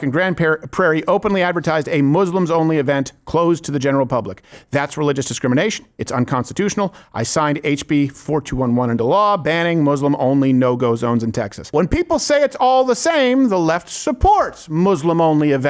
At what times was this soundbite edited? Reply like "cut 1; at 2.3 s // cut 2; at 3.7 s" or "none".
cut 1; at 11.6 s